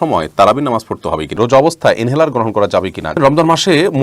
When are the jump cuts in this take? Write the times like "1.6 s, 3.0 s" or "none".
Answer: 1.3 s, 3.2 s